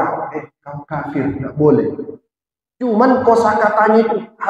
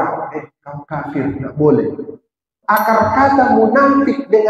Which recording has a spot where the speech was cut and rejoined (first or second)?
second